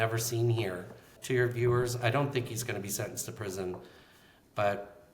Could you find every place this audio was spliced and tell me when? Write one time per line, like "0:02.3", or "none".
0:01.1